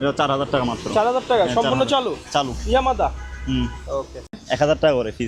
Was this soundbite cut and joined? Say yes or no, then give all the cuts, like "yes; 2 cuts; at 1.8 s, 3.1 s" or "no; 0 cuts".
yes; 1 cut; at 4.3 s